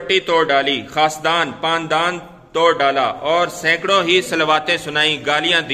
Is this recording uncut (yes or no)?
yes